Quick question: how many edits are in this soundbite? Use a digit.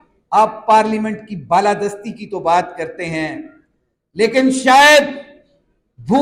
0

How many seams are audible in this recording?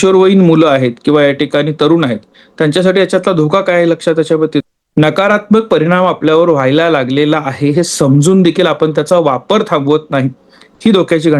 1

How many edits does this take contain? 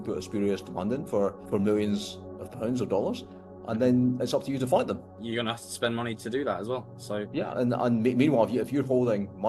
2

